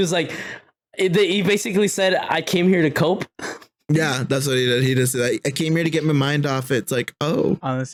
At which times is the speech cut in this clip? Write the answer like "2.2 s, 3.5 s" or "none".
none